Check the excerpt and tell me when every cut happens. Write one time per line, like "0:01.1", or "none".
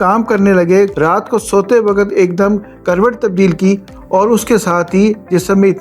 0:00.9